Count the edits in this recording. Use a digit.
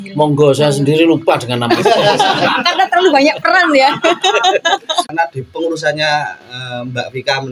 1